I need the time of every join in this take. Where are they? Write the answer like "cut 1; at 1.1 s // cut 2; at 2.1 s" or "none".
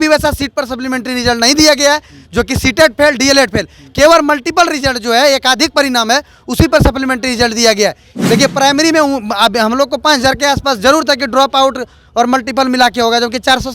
cut 1; at 8.1 s